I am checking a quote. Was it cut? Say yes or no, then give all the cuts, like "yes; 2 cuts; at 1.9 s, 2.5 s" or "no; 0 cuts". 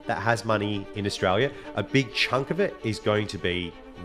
no; 0 cuts